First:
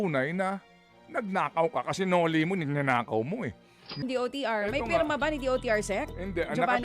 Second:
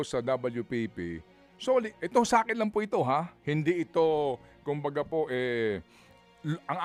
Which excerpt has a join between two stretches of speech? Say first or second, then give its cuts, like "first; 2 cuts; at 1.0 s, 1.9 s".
first; 1 cut; at 4.0 s